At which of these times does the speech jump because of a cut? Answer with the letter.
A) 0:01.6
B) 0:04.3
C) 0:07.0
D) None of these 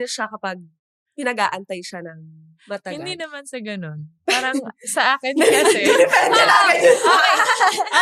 D